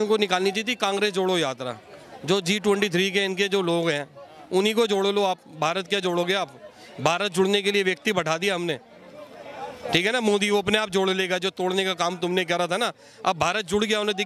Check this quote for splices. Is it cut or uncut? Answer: uncut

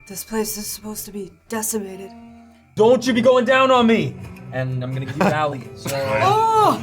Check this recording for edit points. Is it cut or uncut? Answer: cut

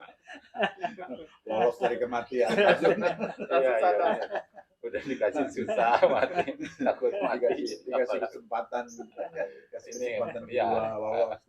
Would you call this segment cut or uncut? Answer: uncut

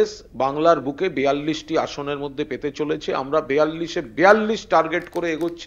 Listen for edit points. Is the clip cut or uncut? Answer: uncut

